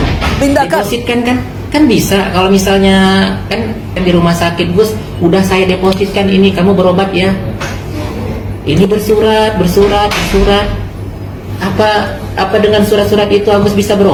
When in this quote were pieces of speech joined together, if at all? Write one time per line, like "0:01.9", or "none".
none